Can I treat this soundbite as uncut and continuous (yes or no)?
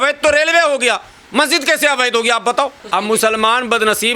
no